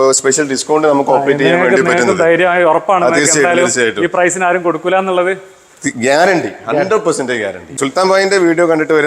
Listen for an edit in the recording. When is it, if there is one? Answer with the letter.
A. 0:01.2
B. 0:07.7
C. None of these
B